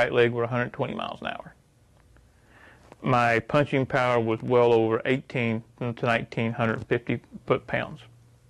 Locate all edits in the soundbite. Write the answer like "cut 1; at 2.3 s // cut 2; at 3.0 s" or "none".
none